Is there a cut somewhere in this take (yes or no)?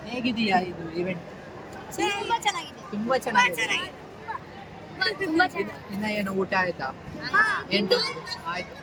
no